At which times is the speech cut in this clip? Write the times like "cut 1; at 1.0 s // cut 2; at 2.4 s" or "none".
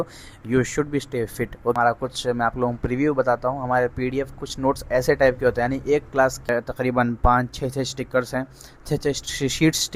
cut 1; at 1.7 s // cut 2; at 6.5 s